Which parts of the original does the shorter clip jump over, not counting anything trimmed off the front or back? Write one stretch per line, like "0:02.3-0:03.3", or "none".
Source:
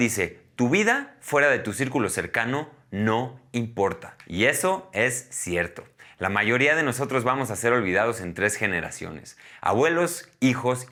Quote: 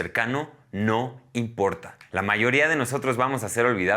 0:04.1-0:06.0

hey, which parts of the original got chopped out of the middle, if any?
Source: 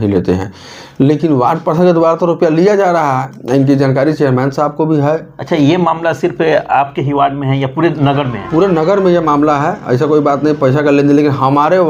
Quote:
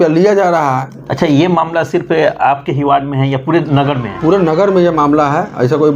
0:03.4-0:05.3

